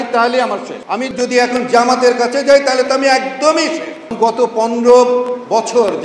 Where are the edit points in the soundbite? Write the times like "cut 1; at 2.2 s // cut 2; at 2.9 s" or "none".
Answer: cut 1; at 1.1 s // cut 2; at 4.1 s